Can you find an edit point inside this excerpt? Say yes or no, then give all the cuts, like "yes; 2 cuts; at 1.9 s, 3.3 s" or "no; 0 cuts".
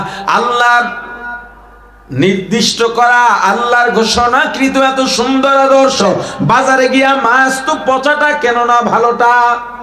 no; 0 cuts